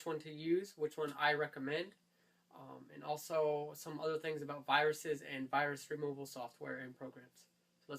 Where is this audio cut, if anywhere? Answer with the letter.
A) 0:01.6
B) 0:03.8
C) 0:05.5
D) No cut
C